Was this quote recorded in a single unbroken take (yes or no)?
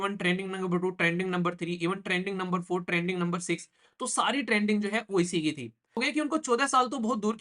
no